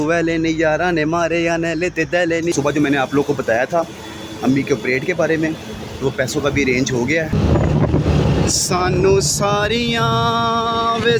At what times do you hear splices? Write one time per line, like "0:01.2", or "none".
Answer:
0:02.5
0:07.3